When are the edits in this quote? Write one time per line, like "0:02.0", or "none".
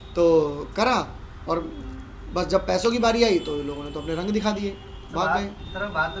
none